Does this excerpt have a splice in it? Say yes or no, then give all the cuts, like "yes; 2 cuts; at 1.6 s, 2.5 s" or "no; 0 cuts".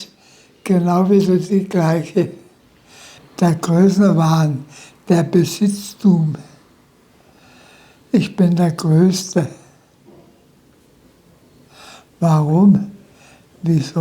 yes; 1 cut; at 3.2 s